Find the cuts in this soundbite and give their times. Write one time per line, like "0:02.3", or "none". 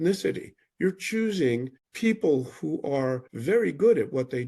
0:01.8
0:03.3